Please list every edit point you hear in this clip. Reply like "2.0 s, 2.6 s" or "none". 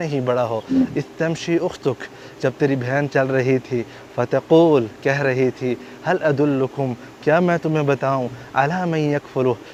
none